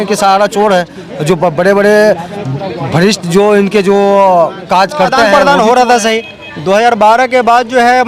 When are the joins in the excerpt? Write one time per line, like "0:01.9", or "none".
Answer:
0:05.3